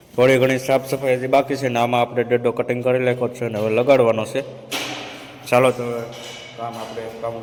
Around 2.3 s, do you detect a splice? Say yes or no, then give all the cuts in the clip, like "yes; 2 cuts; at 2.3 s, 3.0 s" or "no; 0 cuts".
no; 0 cuts